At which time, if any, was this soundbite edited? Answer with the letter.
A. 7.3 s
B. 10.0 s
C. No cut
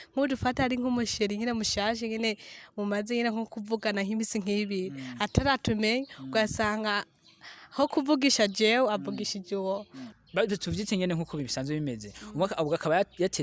B